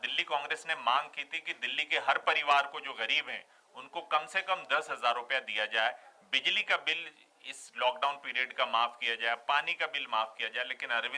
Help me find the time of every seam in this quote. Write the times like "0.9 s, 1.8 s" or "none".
none